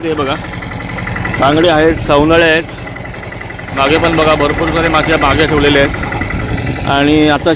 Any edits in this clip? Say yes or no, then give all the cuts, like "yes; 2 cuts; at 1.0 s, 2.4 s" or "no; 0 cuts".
no; 0 cuts